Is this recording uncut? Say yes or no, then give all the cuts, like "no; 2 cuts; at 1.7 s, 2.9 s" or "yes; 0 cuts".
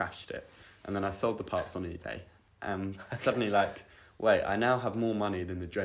yes; 0 cuts